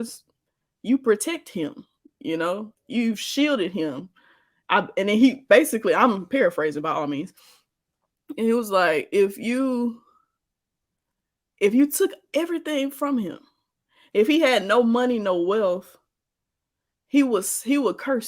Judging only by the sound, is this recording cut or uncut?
uncut